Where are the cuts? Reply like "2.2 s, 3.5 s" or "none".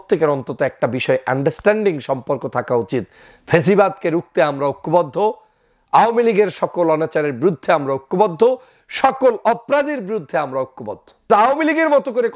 11.3 s